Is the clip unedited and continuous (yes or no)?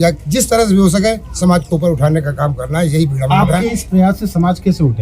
yes